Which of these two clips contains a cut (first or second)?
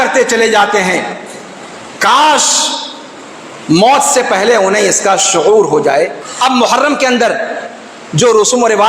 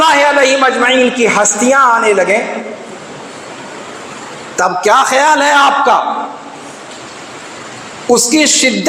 first